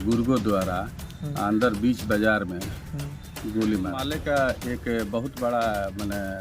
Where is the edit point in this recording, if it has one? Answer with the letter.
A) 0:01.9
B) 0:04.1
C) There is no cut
B